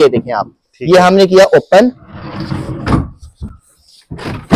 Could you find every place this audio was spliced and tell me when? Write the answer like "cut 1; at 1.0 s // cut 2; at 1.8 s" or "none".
none